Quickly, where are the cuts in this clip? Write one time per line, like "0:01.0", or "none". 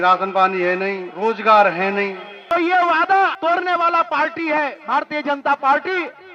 0:01.1
0:02.3
0:03.4